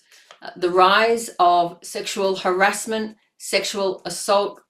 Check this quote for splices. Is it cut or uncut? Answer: uncut